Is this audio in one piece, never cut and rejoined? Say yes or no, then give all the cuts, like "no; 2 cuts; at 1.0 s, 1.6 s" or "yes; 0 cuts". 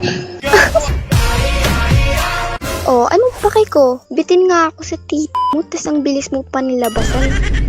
no; 1 cut; at 2.5 s